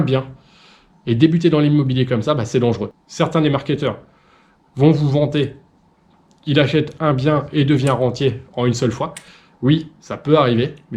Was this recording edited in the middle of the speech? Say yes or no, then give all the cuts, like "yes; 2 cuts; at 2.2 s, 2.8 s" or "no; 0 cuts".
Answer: yes; 1 cut; at 2.9 s